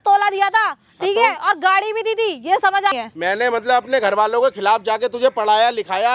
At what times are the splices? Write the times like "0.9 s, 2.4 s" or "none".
2.9 s